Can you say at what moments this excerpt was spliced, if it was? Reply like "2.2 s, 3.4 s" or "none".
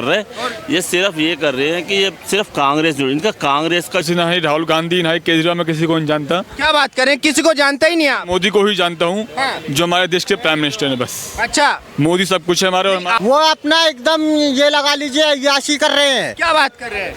4.0 s, 13.1 s